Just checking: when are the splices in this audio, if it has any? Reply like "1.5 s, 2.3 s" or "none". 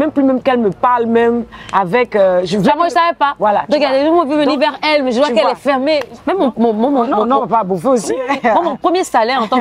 6.1 s